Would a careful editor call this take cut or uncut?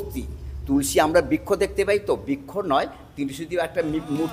uncut